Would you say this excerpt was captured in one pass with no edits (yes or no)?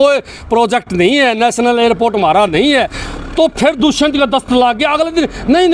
yes